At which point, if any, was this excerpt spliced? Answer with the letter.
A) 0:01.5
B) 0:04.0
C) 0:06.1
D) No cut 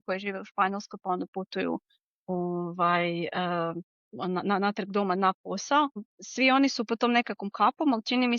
C